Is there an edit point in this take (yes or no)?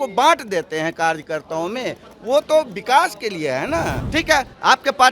yes